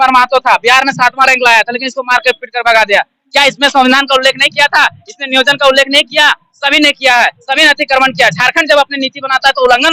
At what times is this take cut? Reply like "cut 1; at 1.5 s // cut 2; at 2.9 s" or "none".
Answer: none